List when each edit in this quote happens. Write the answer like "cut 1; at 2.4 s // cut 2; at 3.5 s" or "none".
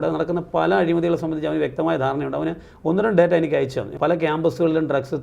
cut 1; at 3.9 s